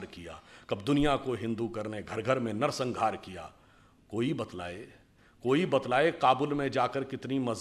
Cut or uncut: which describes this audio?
uncut